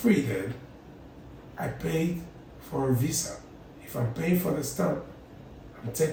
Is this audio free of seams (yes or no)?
yes